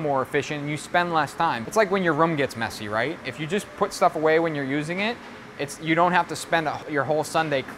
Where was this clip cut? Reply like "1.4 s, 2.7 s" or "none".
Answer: 1.6 s, 6.8 s